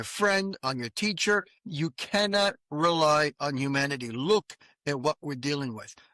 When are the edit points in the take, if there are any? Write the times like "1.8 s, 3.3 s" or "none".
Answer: 1.6 s